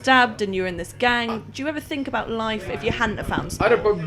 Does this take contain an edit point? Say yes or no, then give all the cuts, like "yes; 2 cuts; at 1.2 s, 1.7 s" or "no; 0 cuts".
no; 0 cuts